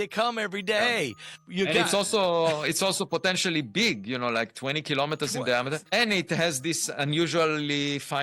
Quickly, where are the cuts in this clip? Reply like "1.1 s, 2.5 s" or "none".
1.4 s, 5.8 s